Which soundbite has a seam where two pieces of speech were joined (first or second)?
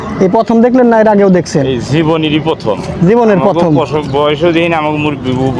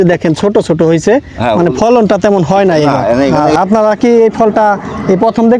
second